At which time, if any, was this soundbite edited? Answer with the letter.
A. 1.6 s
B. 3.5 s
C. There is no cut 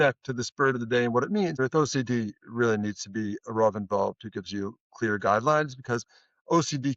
A